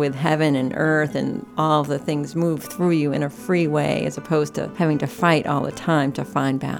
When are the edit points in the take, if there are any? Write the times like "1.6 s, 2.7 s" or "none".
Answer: 1.5 s, 4.6 s